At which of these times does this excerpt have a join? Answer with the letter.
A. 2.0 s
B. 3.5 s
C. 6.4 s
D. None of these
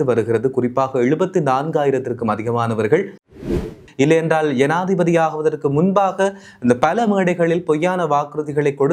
B